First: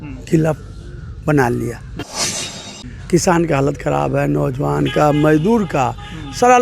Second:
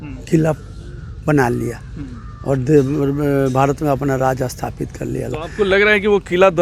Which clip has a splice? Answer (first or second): first